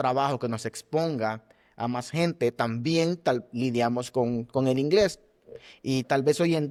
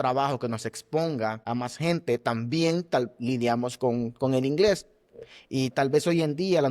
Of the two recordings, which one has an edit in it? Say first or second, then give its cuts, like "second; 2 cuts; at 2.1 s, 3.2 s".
second; 1 cut; at 1.4 s